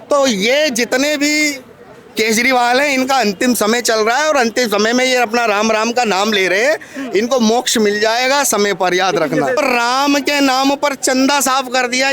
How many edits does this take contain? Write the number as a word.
one